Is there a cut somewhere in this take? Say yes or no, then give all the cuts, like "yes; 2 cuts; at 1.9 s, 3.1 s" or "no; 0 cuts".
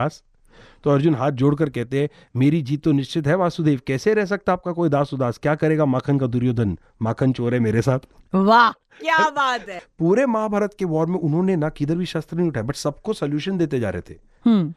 yes; 1 cut; at 9.7 s